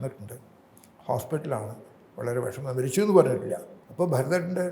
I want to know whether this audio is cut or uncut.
cut